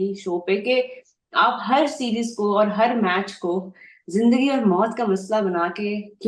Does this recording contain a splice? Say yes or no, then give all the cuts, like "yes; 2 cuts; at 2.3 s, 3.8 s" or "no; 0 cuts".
no; 0 cuts